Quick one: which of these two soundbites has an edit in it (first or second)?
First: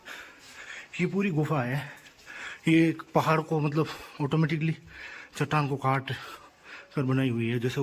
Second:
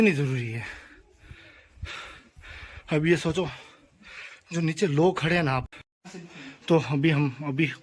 second